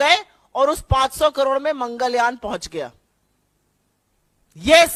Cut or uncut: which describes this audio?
uncut